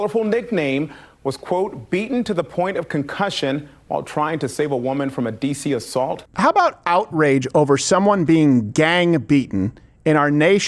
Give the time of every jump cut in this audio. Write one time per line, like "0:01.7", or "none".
0:06.3

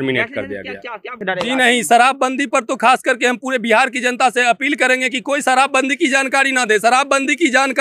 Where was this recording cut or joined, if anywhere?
0:01.2

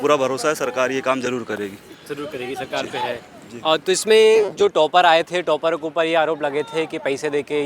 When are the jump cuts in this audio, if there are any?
none

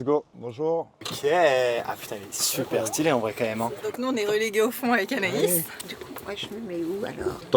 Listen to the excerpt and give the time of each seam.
0:01.0
0:03.9
0:05.8

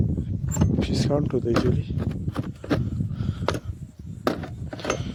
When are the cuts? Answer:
none

